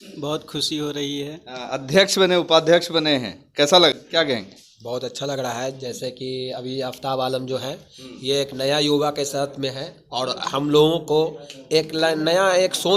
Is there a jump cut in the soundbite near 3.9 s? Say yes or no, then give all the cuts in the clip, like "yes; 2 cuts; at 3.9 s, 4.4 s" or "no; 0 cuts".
yes; 1 cut; at 3.9 s